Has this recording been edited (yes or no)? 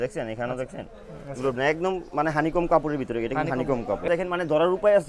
yes